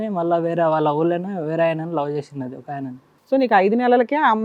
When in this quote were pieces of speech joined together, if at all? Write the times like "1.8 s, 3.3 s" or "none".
3.0 s